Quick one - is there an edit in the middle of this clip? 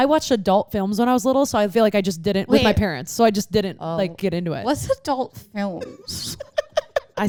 no; 0 cuts

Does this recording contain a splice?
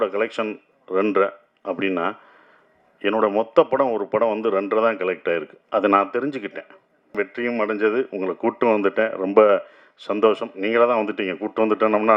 yes; 1 cut; at 7.1 s

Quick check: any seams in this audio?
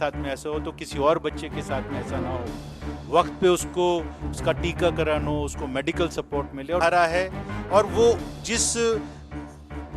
yes; 1 cut; at 6.8 s

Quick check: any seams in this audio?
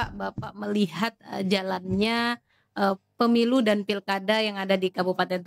no; 0 cuts

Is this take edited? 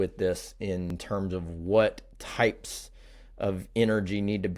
yes; 1 cut; at 1.0 s

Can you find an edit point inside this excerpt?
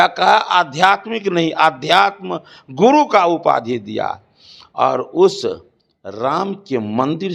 no; 0 cuts

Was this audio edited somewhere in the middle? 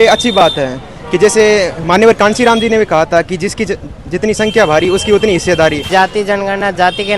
yes; 1 cut; at 5.9 s

